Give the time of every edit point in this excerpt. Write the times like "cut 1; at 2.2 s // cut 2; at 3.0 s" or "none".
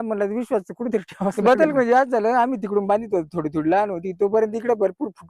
cut 1; at 1.4 s